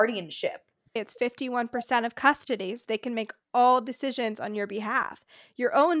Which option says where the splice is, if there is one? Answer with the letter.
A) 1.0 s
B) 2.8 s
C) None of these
A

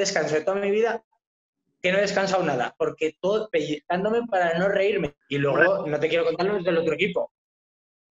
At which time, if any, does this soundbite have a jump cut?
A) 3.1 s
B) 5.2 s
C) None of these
B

